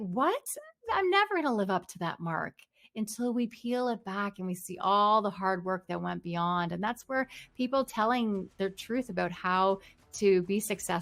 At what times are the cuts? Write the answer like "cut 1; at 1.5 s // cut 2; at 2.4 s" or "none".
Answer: none